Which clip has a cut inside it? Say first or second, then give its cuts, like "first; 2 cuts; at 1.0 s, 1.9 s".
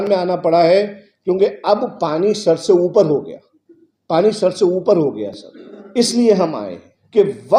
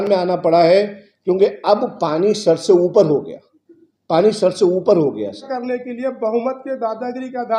second; 1 cut; at 5.5 s